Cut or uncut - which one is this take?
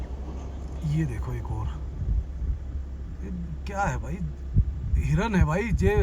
uncut